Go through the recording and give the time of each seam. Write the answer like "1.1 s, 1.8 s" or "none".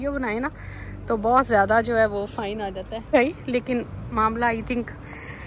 3.1 s